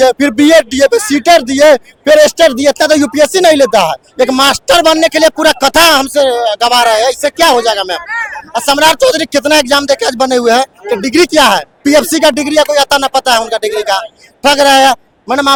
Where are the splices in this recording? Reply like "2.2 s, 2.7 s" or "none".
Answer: none